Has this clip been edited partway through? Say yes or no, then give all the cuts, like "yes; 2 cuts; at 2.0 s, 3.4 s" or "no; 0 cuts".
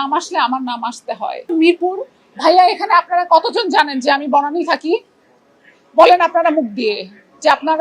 yes; 1 cut; at 1.5 s